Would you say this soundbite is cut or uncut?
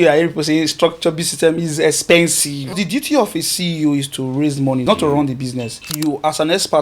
cut